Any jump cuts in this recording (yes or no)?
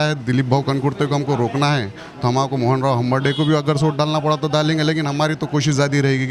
no